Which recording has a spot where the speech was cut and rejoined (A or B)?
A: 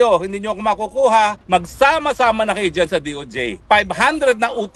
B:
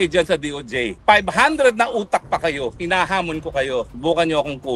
A